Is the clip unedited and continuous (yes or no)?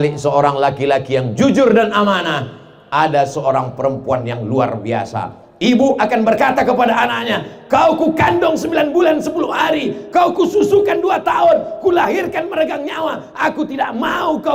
yes